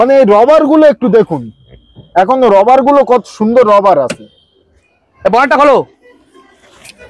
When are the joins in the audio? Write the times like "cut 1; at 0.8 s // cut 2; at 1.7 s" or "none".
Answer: none

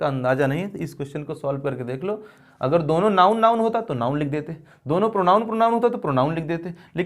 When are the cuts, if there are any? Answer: cut 1; at 2.4 s

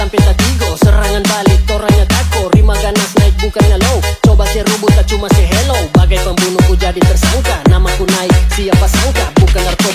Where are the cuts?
none

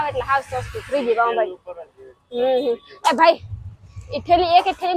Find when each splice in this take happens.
none

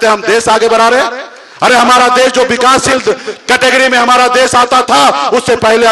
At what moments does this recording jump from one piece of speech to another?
none

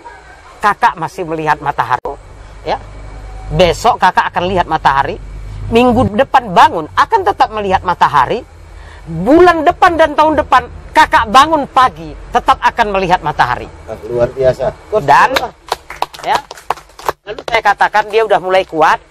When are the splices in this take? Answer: cut 1; at 2.2 s

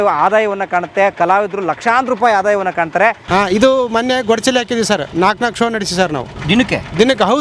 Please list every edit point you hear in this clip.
cut 1; at 3.2 s // cut 2; at 5.1 s // cut 3; at 6.7 s

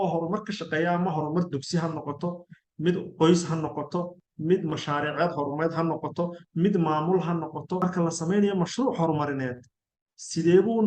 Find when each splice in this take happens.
cut 1; at 7.8 s

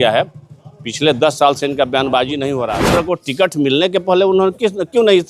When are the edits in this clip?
cut 1; at 2.6 s

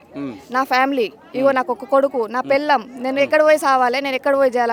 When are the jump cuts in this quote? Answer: none

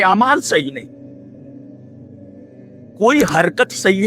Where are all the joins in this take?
cut 1; at 1.4 s // cut 2; at 3.0 s

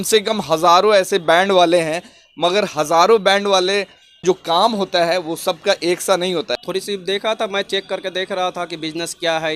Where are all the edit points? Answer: cut 1; at 4.2 s // cut 2; at 6.5 s

